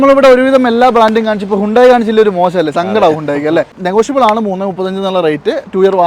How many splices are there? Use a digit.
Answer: 1